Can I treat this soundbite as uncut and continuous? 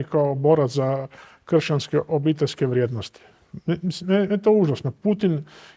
yes; 0 cuts

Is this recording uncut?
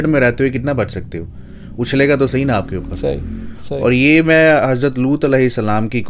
yes; 0 cuts

